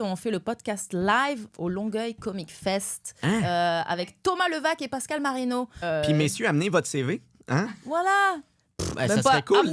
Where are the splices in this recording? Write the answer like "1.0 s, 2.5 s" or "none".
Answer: 5.8 s